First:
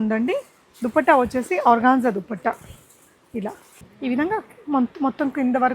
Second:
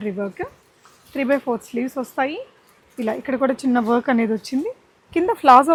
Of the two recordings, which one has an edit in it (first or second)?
first